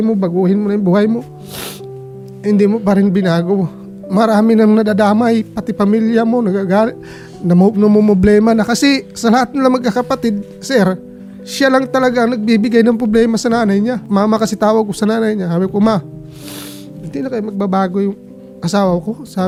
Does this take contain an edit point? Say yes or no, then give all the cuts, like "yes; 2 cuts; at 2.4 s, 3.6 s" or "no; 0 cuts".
no; 0 cuts